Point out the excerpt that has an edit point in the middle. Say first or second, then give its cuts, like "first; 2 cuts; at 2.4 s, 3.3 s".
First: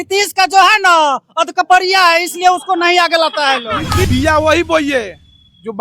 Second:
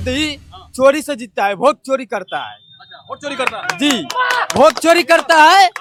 first; 1 cut; at 4.0 s